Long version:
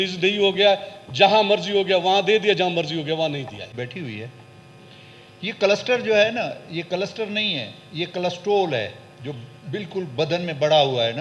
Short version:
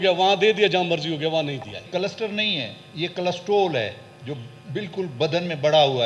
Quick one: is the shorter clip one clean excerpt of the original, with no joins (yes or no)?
no